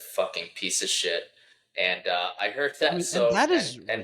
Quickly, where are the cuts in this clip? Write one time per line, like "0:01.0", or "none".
none